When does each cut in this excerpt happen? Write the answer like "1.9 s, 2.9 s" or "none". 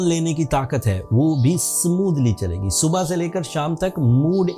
none

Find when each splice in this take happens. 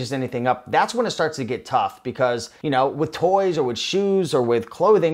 2.5 s

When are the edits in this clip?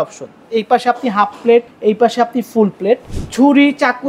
1.7 s, 3.2 s

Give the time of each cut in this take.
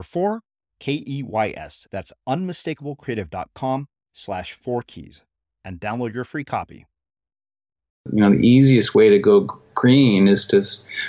8.1 s

